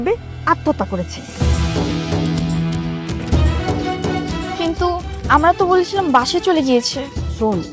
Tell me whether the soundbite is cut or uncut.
uncut